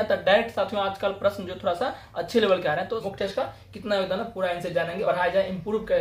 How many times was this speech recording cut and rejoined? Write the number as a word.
two